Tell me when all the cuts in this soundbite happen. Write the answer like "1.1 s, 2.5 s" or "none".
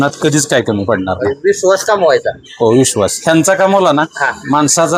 none

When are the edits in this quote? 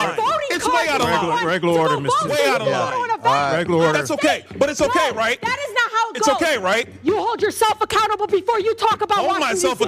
7.4 s

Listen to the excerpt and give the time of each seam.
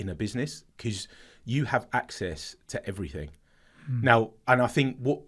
none

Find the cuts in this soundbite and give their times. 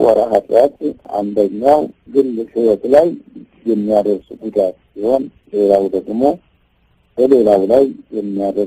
1.0 s, 2.0 s

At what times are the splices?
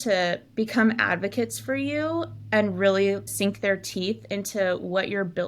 none

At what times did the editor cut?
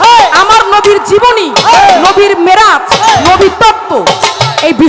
none

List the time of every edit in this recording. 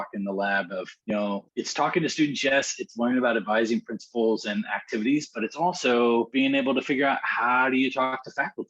0.9 s, 1.5 s, 6.3 s

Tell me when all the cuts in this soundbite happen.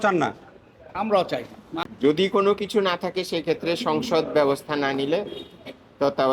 1.8 s

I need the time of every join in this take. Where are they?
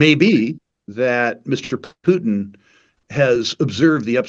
none

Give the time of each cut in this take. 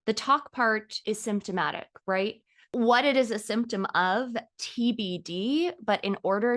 0.9 s, 2.5 s

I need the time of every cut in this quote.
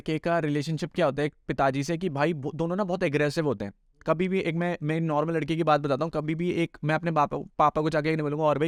none

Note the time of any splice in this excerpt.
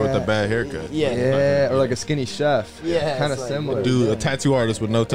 none

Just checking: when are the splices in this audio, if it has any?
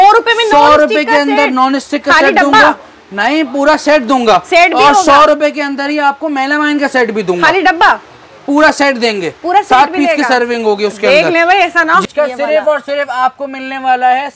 12.0 s

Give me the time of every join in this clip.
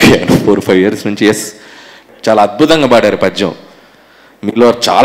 2.0 s

